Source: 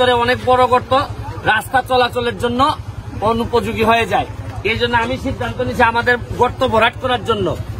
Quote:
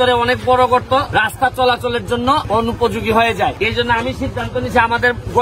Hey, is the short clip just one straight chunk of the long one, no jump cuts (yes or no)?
no